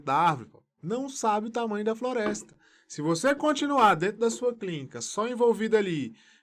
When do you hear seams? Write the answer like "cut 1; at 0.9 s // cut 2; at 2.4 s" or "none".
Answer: none